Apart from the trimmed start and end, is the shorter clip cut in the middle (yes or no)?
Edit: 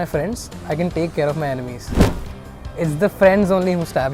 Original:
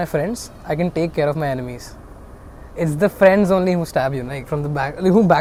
no